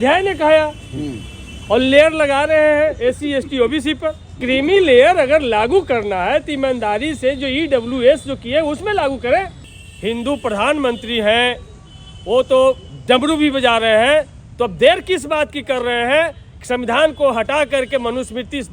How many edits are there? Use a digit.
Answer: 2